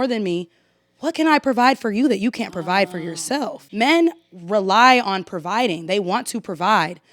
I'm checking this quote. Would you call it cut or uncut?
cut